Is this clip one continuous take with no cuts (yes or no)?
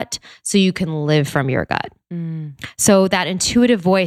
yes